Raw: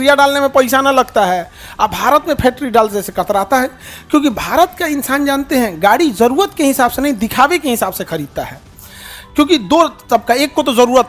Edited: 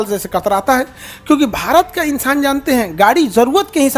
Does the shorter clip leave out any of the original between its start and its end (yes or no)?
no